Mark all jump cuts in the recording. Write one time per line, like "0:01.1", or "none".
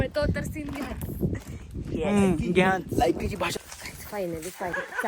0:03.6